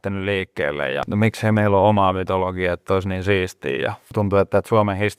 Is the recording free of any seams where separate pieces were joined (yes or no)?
no